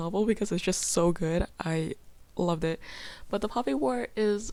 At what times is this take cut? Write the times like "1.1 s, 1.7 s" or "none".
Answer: none